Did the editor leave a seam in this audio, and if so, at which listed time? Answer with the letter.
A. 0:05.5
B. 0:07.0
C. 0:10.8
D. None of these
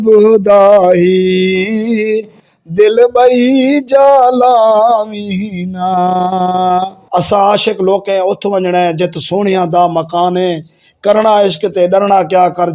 B